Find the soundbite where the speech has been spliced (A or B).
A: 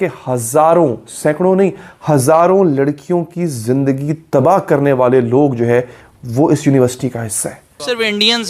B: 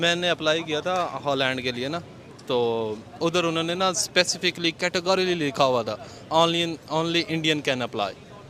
A